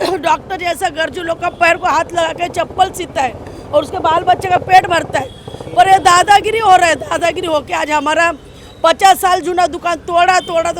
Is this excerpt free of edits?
yes; 0 cuts

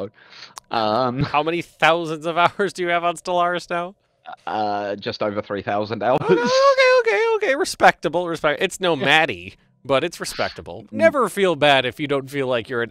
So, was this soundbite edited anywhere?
yes; 1 cut; at 10.9 s

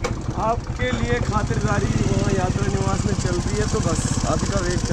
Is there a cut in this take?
no; 0 cuts

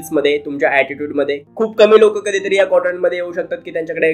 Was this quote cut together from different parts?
yes; 1 cut; at 1.4 s

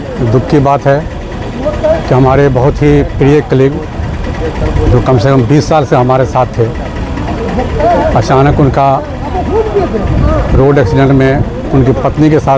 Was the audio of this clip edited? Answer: no; 0 cuts

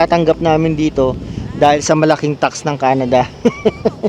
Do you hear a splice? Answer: no; 0 cuts

